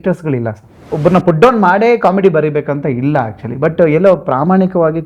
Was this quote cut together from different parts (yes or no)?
yes